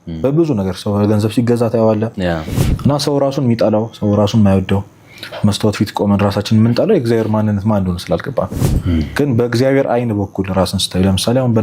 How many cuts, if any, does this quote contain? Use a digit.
1